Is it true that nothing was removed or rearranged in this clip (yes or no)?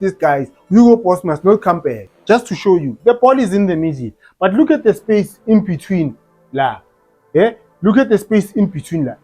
no